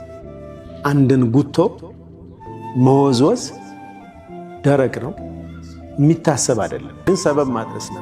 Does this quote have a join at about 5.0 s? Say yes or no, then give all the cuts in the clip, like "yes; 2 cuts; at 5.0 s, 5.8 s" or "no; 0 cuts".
no; 1 cut; at 7.1 s